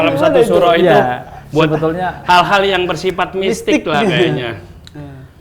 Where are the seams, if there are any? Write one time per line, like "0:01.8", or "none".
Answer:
none

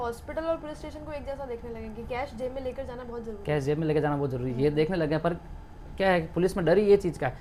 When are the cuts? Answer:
none

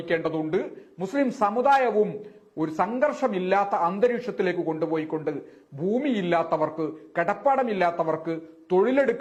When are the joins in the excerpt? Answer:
none

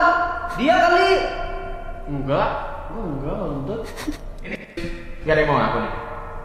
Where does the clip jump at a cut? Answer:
0:04.8

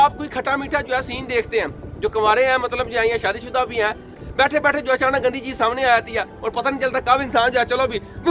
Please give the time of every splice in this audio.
0:04.2

